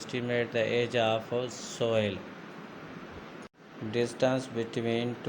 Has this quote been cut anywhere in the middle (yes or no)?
yes